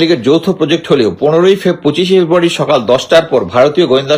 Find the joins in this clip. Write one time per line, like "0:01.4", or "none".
none